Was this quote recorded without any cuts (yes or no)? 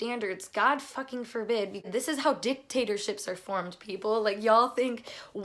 no